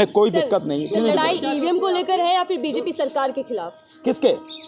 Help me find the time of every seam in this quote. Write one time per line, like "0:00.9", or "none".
none